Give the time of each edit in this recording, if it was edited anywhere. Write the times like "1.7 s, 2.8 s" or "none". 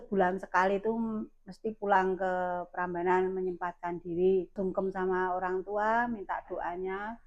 4.6 s